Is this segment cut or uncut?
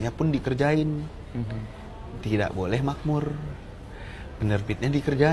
uncut